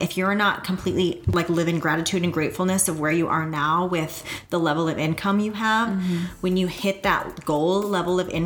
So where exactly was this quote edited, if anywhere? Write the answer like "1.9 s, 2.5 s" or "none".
1.3 s